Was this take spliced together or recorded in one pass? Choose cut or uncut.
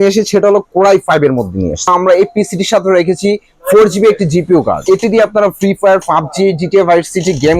cut